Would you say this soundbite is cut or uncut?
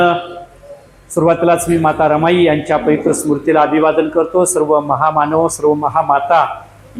uncut